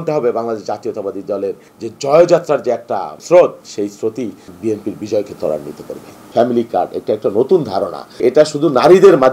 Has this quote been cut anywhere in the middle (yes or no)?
yes